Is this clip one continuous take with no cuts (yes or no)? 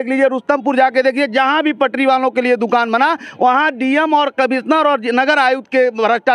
yes